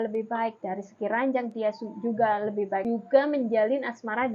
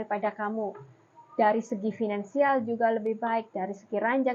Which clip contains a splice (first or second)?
first